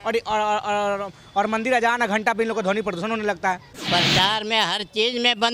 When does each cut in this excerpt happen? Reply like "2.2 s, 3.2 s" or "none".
3.7 s